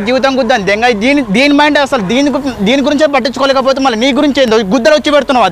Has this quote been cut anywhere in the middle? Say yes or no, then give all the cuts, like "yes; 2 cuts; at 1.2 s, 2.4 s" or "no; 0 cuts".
no; 0 cuts